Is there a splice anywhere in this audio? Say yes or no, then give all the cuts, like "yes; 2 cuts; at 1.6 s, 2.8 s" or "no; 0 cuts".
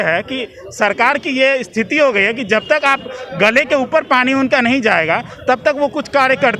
no; 0 cuts